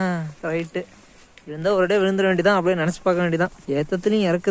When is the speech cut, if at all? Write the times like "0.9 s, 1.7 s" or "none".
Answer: 3.6 s